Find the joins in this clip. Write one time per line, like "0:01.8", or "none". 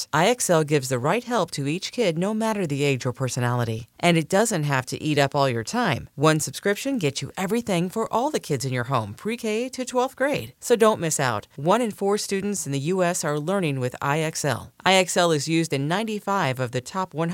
none